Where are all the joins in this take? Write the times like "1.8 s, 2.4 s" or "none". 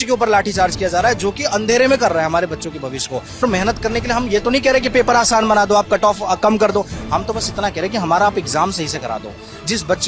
3.4 s